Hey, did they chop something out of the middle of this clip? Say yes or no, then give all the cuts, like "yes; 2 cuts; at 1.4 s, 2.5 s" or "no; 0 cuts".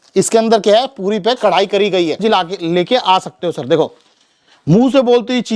yes; 1 cut; at 2.2 s